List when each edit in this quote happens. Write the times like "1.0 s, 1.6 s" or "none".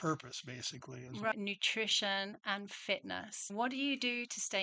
1.3 s, 3.5 s